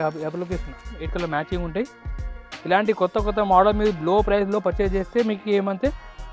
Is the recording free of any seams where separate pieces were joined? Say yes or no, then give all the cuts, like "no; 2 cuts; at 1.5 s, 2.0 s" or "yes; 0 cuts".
no; 1 cut; at 1.0 s